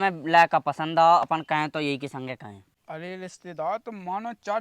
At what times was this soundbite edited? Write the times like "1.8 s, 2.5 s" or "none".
2.7 s